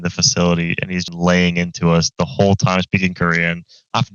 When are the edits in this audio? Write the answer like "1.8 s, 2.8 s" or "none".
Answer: 1.0 s